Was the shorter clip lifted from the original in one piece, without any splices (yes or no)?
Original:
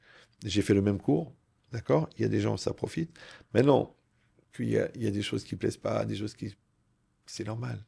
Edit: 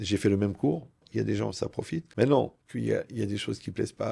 no